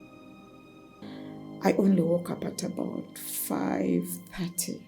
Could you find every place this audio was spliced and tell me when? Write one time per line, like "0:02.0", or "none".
0:01.0